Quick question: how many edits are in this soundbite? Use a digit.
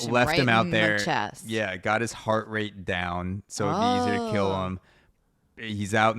0